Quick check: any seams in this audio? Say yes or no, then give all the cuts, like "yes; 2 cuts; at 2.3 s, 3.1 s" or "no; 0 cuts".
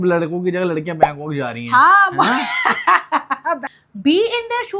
yes; 1 cut; at 3.6 s